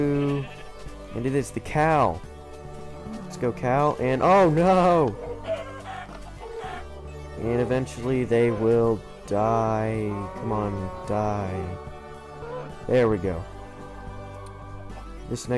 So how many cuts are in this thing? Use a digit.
0